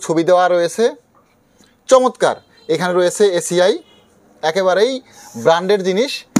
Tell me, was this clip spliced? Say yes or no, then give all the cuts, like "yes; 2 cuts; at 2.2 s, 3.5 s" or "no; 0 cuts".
no; 0 cuts